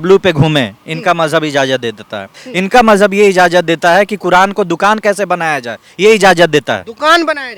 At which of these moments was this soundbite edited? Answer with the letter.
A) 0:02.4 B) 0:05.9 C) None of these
A